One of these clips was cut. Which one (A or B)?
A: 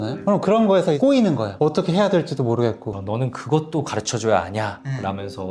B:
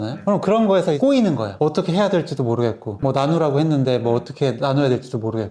A